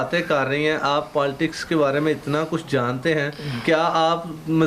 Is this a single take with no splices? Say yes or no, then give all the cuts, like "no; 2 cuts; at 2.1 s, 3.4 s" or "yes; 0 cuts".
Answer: yes; 0 cuts